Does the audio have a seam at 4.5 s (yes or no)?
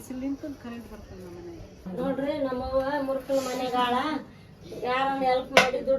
no